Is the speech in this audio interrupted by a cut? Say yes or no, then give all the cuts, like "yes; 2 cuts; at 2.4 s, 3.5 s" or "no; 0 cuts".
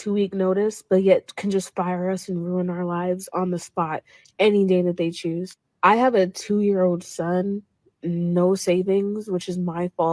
no; 0 cuts